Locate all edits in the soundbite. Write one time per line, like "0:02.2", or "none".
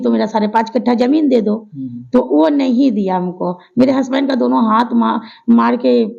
none

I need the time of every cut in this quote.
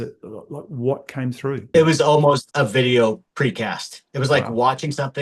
0:01.7
0:02.5
0:03.3

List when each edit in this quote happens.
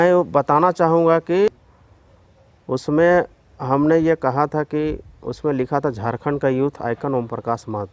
0:01.7

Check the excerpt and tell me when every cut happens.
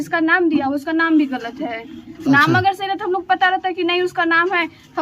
none

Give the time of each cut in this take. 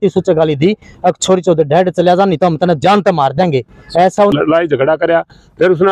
0:04.3

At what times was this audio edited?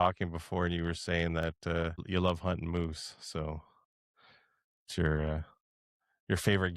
0:02.0

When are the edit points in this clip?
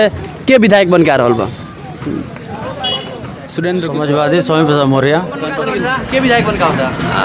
0:03.8
0:05.6

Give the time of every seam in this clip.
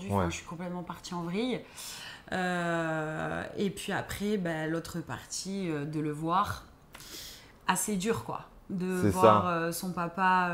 none

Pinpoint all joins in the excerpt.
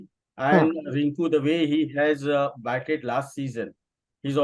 none

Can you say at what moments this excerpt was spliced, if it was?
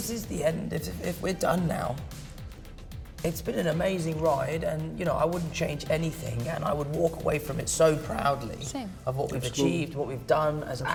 none

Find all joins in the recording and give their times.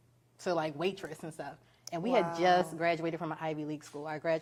none

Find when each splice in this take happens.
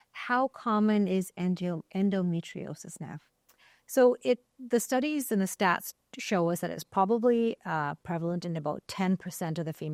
none

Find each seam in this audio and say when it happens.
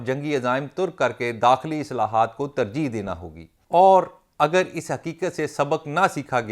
0:03.5

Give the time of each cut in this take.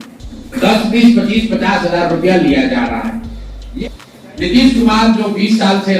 0:03.7

